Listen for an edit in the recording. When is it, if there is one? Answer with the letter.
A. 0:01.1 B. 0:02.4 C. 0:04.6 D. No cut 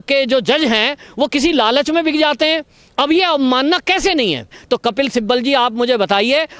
C